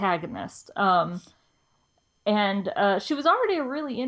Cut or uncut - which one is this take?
cut